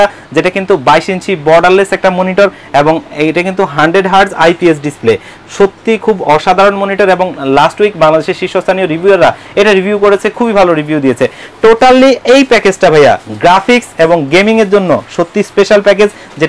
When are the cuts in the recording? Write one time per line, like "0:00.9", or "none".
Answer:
none